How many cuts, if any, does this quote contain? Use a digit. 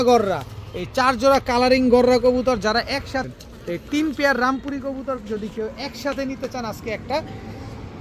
1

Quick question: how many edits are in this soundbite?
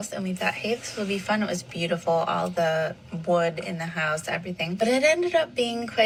0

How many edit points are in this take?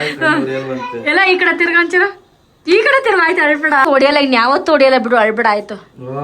1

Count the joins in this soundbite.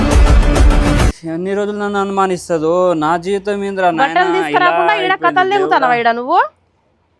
1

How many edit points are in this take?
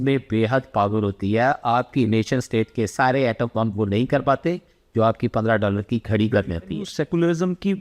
1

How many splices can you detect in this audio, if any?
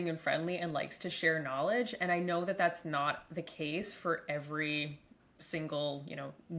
0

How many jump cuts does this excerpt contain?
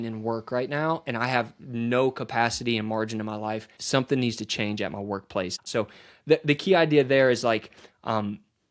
2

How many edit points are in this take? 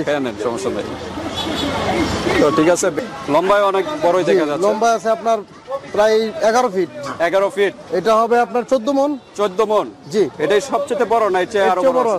2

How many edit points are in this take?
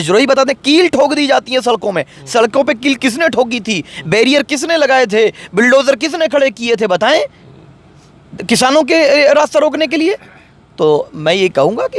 0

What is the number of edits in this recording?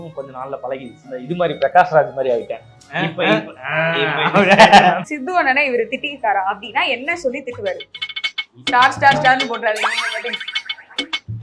2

